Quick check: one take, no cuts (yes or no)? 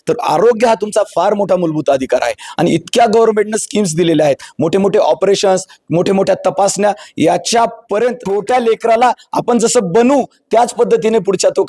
no